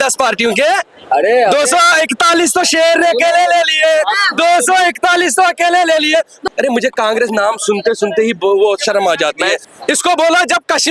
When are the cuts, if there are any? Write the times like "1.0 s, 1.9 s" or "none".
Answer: 6.4 s, 9.6 s